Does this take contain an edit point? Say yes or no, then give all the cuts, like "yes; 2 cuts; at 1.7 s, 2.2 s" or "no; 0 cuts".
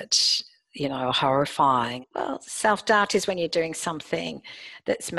yes; 1 cut; at 2.0 s